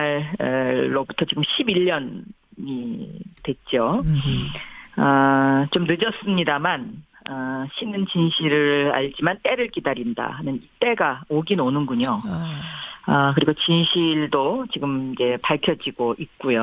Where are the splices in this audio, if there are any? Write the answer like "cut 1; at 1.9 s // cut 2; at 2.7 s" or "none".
none